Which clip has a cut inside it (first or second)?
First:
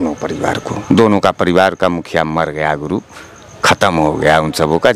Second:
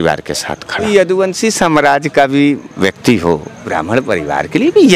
second